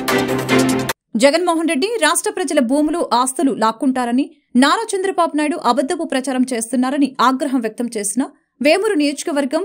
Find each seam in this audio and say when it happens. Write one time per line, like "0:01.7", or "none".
0:01.0